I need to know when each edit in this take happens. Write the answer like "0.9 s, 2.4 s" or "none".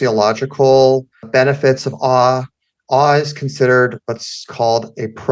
1.2 s